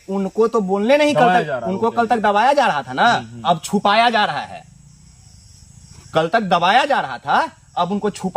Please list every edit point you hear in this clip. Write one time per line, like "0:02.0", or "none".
none

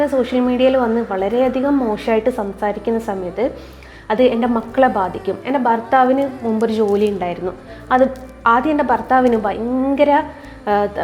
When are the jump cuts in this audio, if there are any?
none

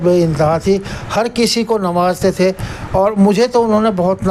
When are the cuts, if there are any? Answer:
none

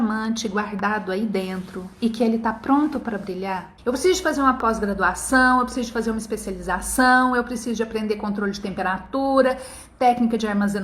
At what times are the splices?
0:03.7

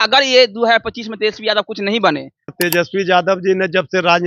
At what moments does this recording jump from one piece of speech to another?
0:02.5

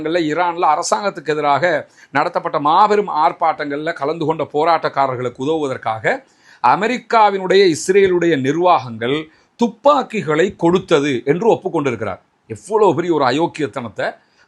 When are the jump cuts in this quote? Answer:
none

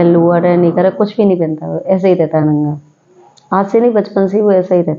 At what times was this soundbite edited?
none

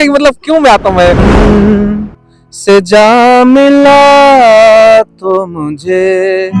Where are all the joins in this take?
0:01.2

